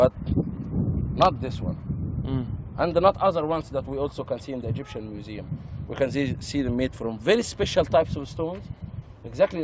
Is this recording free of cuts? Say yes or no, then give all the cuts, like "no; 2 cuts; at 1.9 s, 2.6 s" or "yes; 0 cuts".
yes; 0 cuts